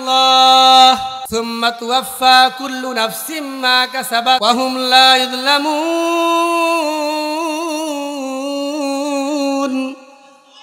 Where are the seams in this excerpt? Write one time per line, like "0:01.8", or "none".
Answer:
0:01.2
0:04.4